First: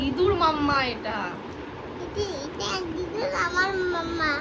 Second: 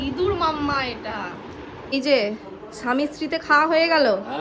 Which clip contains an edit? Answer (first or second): second